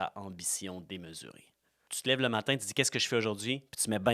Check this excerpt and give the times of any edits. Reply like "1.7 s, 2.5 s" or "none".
1.8 s